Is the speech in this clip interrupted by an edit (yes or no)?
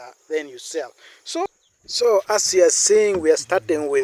yes